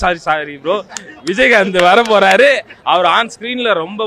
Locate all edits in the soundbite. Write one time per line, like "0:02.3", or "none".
none